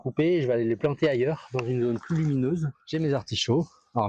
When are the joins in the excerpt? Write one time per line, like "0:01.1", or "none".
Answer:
0:02.8